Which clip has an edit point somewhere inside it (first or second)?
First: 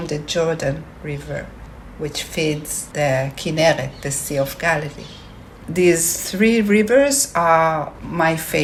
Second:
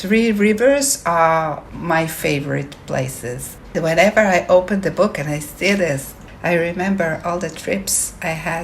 second